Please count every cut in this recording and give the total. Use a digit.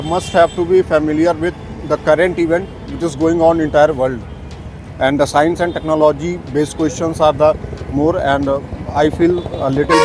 0